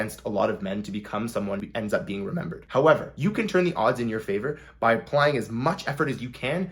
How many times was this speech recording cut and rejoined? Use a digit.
1